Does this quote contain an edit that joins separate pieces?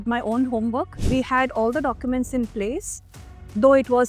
yes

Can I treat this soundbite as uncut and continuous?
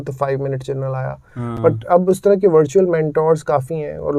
yes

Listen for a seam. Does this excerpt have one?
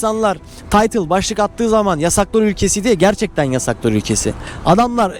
no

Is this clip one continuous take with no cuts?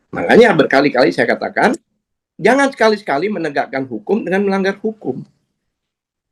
yes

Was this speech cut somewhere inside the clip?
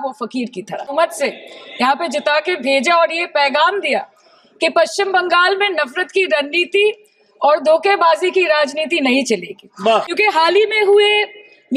yes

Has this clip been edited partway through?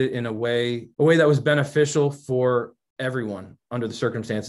no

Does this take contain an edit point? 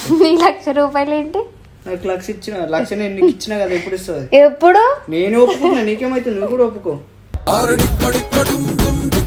no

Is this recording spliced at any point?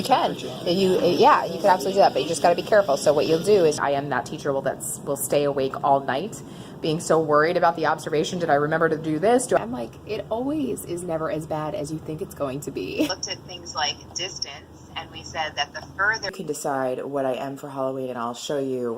yes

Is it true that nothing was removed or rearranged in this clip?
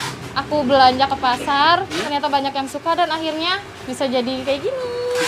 no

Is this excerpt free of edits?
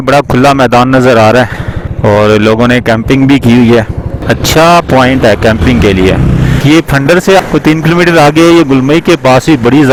yes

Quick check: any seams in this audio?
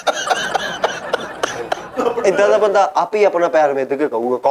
yes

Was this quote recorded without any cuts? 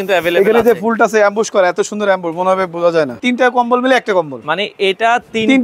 no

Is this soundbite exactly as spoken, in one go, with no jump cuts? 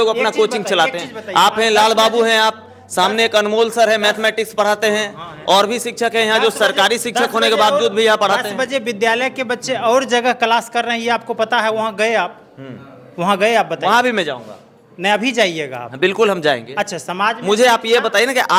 yes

